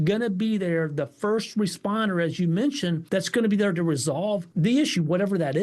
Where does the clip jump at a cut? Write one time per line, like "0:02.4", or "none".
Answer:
0:03.0
0:04.5